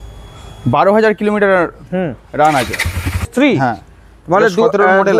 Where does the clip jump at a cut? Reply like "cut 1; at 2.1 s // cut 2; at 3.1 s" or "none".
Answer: cut 1; at 3.3 s